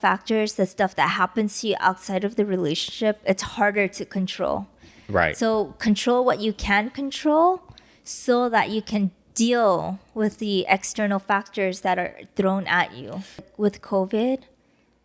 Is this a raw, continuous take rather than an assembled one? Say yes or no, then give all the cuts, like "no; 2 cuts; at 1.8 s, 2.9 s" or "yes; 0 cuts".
no; 1 cut; at 13.5 s